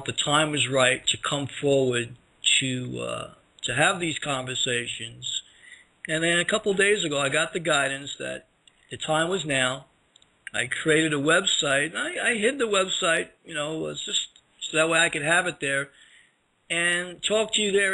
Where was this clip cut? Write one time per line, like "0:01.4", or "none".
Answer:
0:07.3